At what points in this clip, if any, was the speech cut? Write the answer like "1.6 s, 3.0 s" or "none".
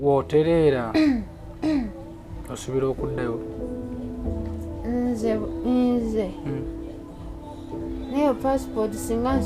none